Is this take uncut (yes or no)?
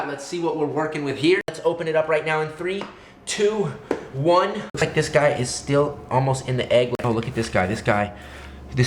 no